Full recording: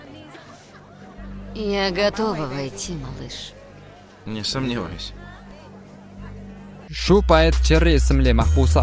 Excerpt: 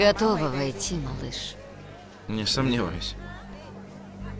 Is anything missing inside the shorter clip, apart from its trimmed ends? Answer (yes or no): no